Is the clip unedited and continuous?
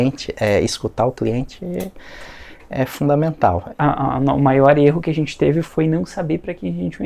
no; 1 cut; at 3.7 s

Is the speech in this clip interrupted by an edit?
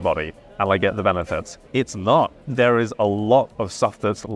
yes; 1 cut; at 1.6 s

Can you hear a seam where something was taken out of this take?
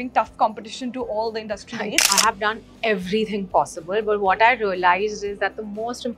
yes; 1 cut; at 2.1 s

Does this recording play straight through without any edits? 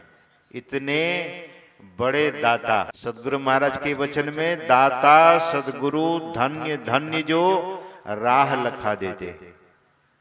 no; 1 cut; at 2.9 s

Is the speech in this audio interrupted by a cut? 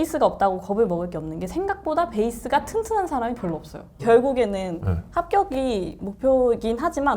yes; 1 cut; at 3.9 s

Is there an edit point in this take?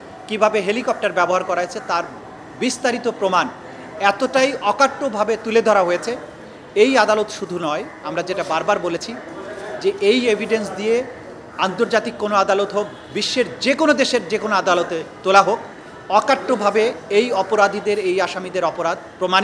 no; 0 cuts

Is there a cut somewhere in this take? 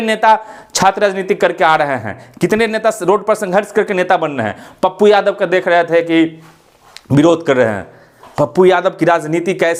no; 0 cuts

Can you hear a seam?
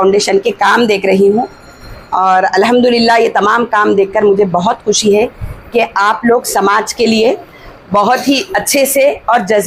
no; 0 cuts

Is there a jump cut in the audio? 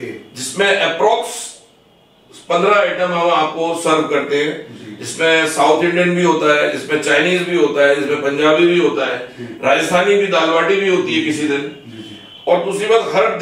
no; 0 cuts

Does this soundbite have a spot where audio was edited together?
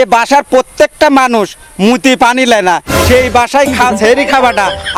no; 0 cuts

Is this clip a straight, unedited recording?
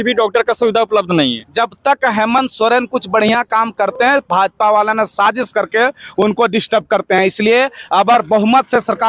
yes; 0 cuts

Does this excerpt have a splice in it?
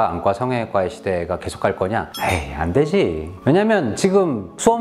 no; 0 cuts

